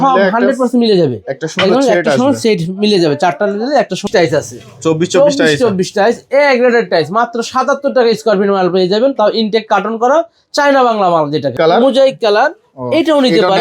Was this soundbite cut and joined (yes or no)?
yes